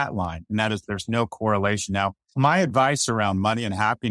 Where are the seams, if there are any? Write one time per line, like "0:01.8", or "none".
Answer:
0:02.3